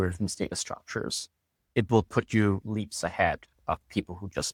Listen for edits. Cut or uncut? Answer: uncut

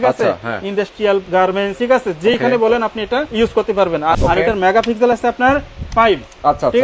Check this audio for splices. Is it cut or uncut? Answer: cut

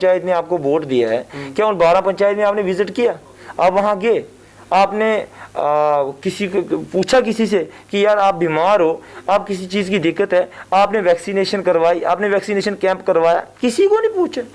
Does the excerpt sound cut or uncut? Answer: uncut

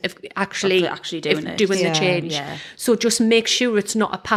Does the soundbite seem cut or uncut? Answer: uncut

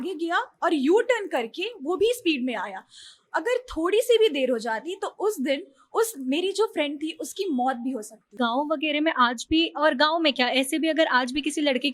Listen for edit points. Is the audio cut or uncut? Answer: cut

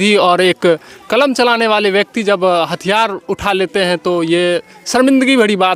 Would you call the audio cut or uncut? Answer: uncut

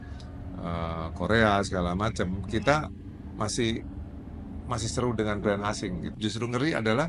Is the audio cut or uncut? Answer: cut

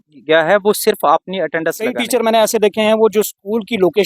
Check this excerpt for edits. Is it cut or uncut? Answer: cut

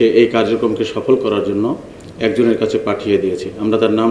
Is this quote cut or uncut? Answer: uncut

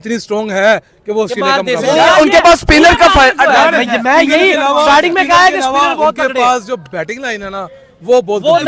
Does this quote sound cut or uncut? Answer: uncut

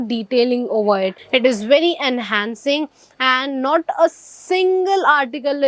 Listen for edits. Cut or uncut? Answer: cut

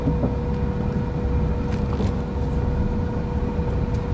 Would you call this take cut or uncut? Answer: uncut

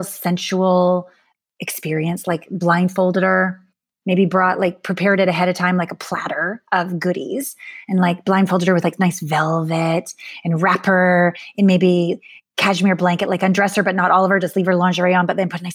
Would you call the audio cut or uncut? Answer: cut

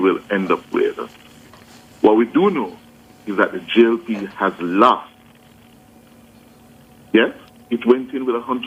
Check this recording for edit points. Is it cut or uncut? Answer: uncut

